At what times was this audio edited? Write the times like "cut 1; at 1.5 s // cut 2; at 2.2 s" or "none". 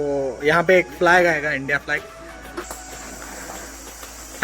cut 1; at 2.7 s